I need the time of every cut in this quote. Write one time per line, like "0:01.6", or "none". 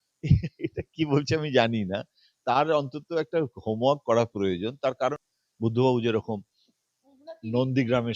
0:05.2